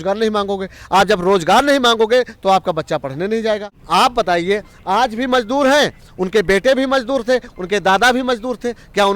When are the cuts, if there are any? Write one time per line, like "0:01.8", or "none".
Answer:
0:03.7